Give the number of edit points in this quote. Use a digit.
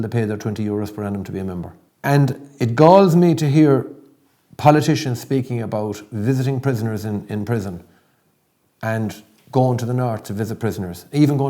1